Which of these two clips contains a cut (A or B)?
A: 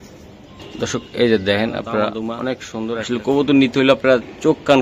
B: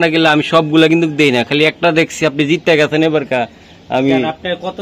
A